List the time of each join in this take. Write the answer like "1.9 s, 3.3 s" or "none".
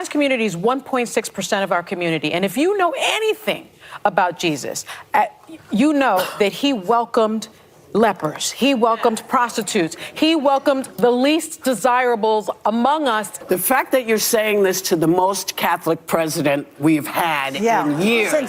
13.3 s